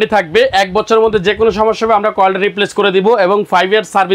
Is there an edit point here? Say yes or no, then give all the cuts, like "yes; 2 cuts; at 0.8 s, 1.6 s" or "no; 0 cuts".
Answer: no; 0 cuts